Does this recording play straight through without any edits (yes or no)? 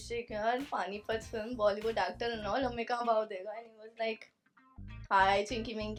yes